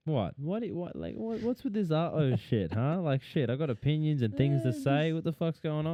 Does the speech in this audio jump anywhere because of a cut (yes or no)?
no